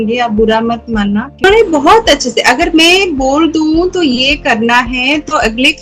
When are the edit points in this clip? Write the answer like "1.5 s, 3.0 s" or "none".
1.4 s